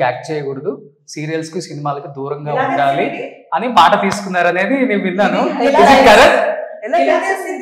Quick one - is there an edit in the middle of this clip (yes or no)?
no